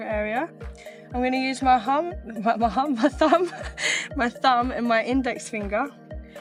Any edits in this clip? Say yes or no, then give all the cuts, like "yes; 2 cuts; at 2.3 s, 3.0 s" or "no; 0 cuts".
no; 0 cuts